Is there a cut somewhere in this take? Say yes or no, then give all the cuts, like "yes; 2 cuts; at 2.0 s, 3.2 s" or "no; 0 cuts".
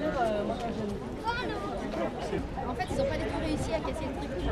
no; 0 cuts